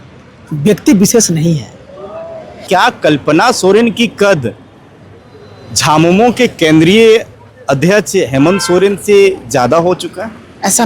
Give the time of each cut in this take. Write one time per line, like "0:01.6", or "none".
0:02.6